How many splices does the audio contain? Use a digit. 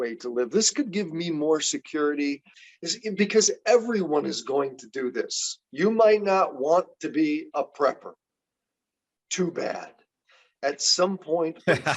1